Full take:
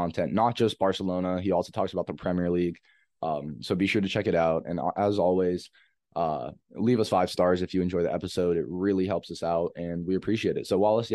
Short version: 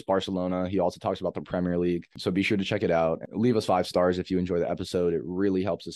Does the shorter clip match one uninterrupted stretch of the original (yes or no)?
no